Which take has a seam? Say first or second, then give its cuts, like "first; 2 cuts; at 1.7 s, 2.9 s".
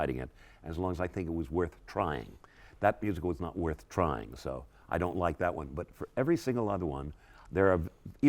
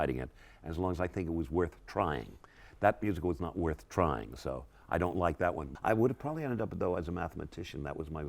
second; 1 cut; at 5.7 s